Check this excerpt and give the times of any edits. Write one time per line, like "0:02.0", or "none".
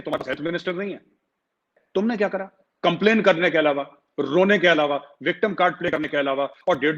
0:01.8